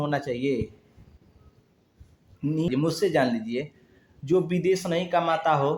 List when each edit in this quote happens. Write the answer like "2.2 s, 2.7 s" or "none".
2.7 s